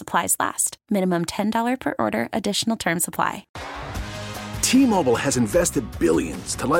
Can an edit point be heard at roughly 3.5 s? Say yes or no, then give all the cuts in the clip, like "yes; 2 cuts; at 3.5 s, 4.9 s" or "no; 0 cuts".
yes; 1 cut; at 3.5 s